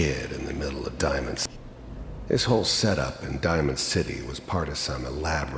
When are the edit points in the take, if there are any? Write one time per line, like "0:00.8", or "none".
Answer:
0:01.4